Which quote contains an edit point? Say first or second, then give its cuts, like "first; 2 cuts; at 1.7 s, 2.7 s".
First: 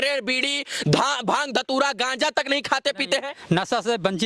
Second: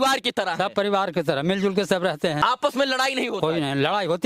second; 1 cut; at 2.4 s